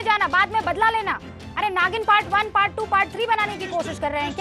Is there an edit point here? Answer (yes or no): no